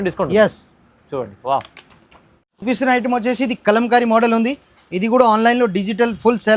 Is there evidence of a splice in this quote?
no; 0 cuts

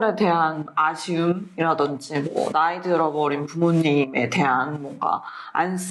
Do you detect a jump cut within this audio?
no; 0 cuts

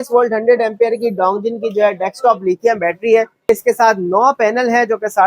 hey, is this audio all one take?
no; 1 cut; at 3.5 s

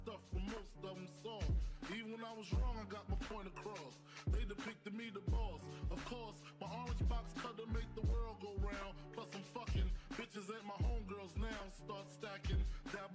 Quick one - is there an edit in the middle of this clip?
no; 0 cuts

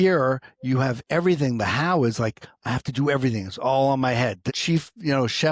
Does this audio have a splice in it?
yes; 1 cut; at 4.4 s

